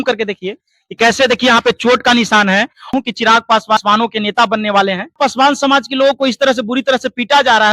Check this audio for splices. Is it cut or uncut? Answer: cut